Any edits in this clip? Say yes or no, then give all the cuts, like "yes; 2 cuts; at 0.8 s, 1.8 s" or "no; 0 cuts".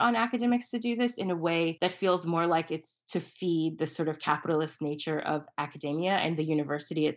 yes; 1 cut; at 1.7 s